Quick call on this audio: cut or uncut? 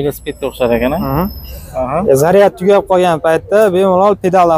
uncut